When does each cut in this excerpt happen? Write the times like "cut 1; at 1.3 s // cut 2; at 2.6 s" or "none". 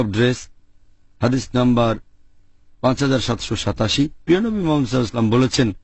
none

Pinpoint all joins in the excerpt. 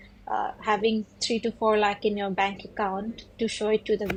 none

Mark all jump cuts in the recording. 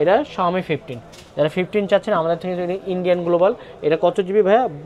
none

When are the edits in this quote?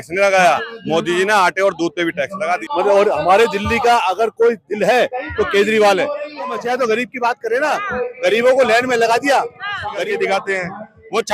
cut 1; at 2.6 s // cut 2; at 6.6 s // cut 3; at 10.0 s

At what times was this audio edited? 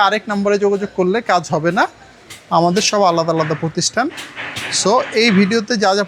none

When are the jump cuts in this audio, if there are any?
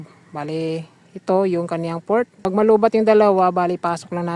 cut 1; at 2.3 s

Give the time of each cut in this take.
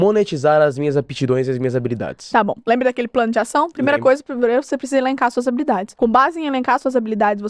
cut 1; at 5.9 s

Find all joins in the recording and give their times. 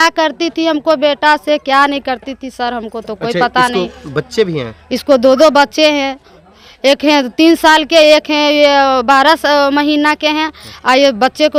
none

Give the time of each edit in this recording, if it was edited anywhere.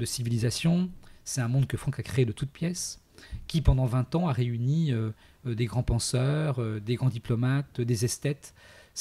none

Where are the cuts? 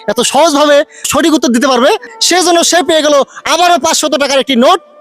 cut 1; at 1.1 s

